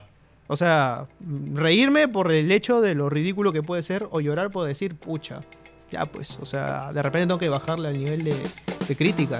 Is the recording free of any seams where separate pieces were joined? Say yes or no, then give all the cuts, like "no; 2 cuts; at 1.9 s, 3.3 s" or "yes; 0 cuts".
yes; 0 cuts